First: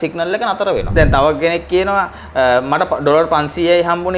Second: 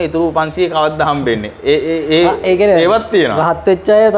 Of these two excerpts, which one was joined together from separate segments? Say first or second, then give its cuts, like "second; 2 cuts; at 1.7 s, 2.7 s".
first; 1 cut; at 0.9 s